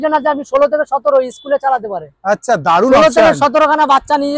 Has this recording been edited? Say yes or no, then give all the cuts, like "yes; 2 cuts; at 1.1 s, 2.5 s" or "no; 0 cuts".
no; 0 cuts